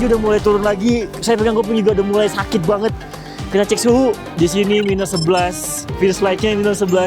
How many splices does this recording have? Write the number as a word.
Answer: one